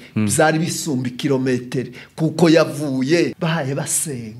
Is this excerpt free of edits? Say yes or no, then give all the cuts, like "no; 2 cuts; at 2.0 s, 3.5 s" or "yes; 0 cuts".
no; 1 cut; at 3.3 s